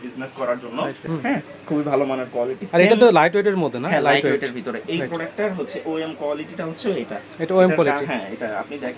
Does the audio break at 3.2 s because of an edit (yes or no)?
no